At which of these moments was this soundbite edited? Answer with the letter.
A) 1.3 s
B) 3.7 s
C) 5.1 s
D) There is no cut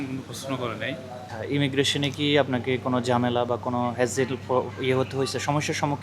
A